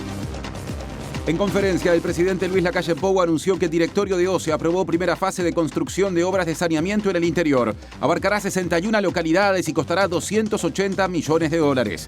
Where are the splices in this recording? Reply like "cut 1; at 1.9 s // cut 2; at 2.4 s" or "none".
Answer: cut 1; at 1.2 s